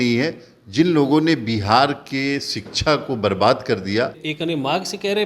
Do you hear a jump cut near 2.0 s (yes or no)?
no